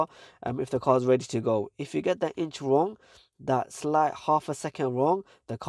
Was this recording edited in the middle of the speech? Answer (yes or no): no